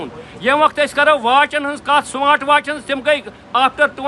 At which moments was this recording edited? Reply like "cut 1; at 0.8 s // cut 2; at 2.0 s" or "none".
none